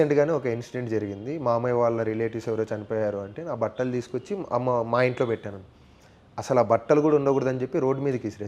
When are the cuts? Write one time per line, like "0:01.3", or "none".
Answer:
none